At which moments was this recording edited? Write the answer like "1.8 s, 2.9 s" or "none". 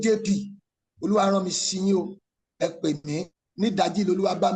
3.4 s